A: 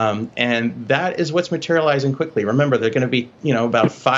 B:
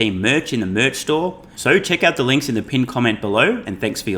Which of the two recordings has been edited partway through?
B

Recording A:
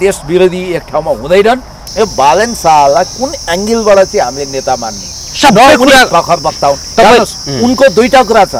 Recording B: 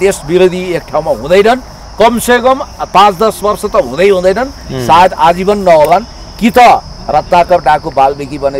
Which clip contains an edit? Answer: A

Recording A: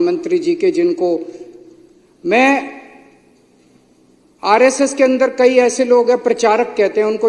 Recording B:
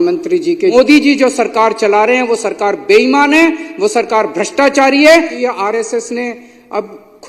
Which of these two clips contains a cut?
B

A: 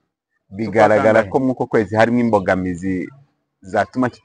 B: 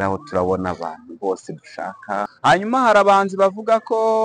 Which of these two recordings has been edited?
B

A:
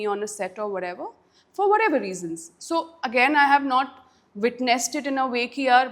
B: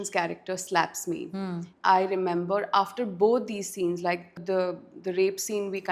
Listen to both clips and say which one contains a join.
B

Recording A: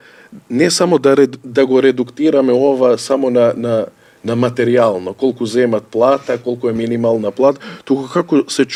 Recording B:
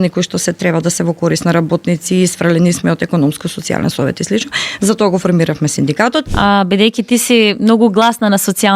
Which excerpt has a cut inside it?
B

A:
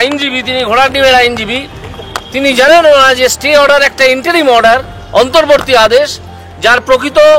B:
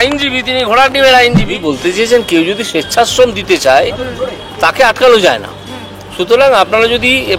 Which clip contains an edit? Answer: B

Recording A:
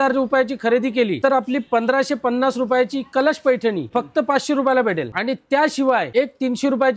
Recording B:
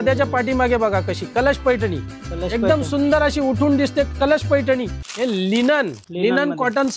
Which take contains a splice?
B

